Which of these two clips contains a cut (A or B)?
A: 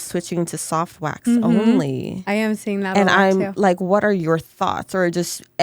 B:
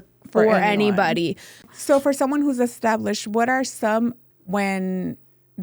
B